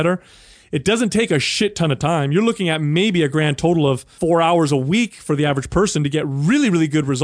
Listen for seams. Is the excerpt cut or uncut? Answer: cut